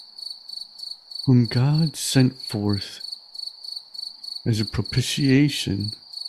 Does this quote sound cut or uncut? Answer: uncut